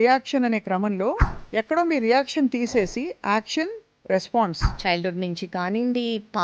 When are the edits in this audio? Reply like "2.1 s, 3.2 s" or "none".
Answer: 4.6 s